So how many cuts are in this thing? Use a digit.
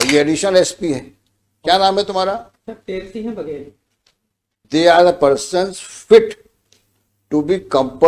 1